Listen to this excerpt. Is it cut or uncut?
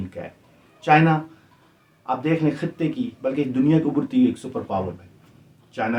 uncut